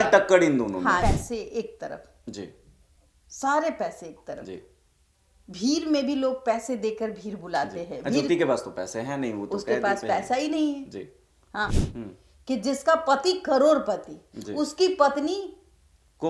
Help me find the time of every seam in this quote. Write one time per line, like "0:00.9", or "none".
0:01.0
0:11.8

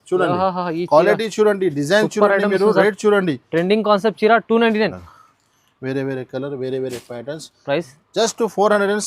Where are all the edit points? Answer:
0:04.8

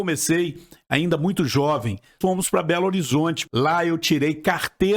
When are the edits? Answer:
0:02.2
0:03.4

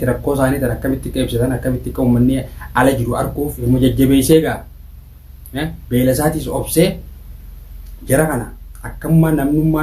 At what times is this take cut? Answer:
0:03.6

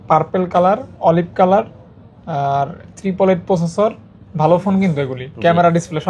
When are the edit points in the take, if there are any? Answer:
none

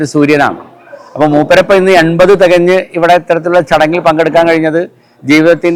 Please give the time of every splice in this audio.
none

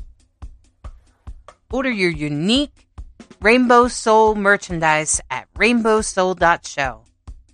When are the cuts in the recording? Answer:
0:01.5

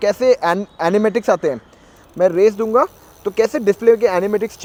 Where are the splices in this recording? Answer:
none

